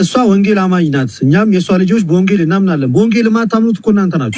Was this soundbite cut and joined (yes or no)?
no